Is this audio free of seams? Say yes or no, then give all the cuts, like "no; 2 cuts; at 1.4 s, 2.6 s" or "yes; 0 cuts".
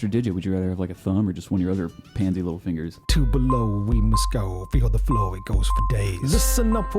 no; 1 cut; at 3.0 s